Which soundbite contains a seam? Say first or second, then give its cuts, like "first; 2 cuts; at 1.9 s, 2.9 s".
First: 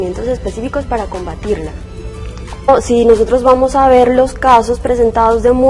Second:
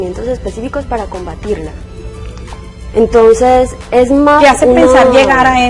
second; 1 cut; at 2.7 s